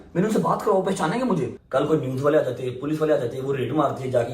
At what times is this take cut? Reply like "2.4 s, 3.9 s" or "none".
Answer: 1.6 s

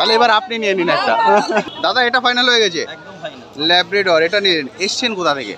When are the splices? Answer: 1.7 s

